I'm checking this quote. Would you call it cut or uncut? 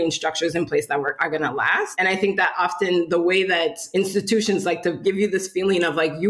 cut